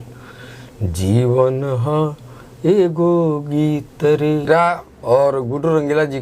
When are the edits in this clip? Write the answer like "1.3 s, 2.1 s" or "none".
4.5 s